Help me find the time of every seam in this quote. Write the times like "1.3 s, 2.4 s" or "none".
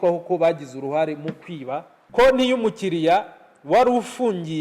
2.1 s